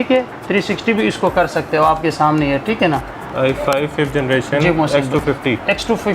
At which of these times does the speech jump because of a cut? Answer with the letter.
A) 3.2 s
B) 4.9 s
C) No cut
A